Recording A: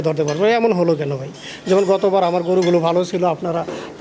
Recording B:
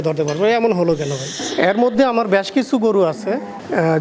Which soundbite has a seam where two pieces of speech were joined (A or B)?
B